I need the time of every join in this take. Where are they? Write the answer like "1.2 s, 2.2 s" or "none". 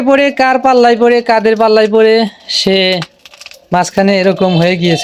none